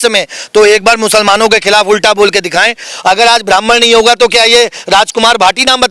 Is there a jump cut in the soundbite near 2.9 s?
yes; 1 cut; at 2.9 s

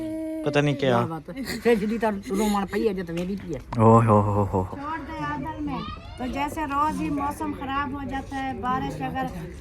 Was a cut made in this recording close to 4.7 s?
yes; 1 cut; at 4.7 s

